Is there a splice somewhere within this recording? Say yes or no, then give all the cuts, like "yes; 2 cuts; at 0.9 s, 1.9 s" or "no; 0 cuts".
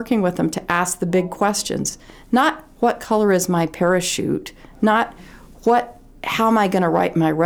no; 0 cuts